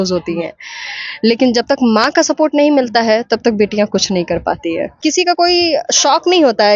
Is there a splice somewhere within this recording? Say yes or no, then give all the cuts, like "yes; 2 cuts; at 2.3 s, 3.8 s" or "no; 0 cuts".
yes; 1 cut; at 4.9 s